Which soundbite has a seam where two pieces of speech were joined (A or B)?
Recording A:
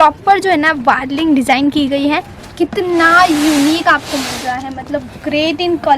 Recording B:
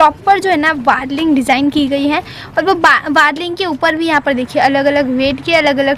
A